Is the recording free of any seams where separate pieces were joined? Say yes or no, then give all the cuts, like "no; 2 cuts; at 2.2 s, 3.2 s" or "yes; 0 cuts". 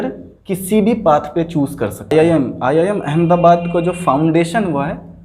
no; 1 cut; at 2.1 s